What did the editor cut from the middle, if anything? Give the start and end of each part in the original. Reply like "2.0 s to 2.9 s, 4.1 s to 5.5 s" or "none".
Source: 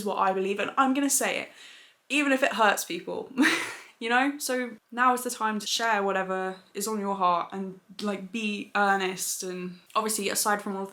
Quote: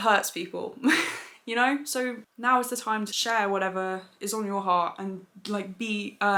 none